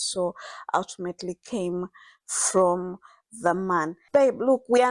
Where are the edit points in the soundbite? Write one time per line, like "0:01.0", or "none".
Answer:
0:04.0